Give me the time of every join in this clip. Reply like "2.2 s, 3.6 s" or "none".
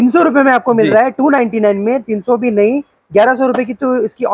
none